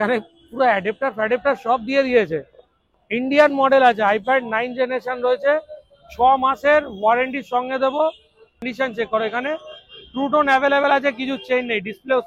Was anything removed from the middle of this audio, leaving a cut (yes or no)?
yes